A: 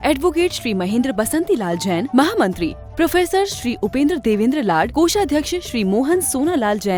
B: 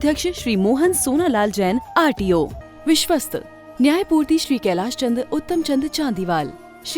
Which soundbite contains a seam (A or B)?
B